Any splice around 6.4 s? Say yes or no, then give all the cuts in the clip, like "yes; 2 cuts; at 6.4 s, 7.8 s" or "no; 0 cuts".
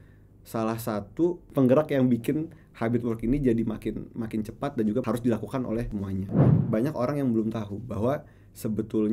yes; 1 cut; at 6.4 s